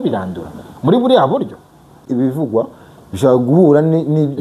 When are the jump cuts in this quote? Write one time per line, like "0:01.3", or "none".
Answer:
0:02.1